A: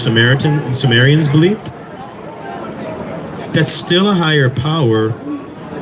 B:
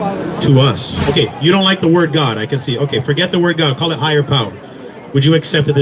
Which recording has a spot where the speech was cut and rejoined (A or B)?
B